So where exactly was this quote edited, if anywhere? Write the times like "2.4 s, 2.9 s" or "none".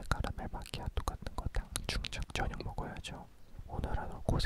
2.2 s